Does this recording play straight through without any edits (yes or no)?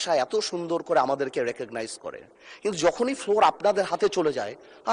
yes